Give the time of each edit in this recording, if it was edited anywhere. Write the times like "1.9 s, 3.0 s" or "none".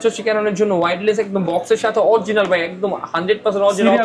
none